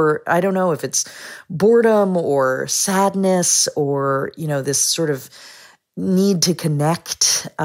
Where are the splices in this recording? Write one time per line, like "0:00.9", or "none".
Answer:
none